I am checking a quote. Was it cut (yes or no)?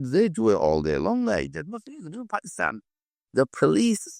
no